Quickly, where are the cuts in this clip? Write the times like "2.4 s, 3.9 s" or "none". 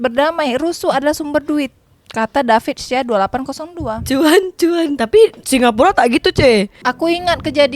6.8 s